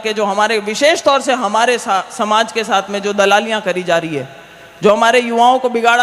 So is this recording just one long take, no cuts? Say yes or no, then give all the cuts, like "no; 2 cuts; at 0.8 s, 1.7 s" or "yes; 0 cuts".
yes; 0 cuts